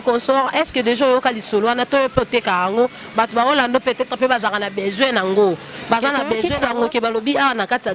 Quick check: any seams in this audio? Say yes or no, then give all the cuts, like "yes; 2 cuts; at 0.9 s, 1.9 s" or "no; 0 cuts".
yes; 1 cut; at 6.4 s